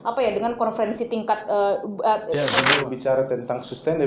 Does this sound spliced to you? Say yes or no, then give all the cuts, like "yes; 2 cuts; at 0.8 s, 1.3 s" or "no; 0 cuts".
yes; 1 cut; at 2.6 s